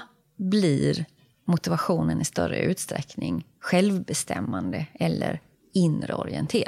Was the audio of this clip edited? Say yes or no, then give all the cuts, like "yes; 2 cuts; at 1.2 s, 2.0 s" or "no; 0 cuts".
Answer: no; 0 cuts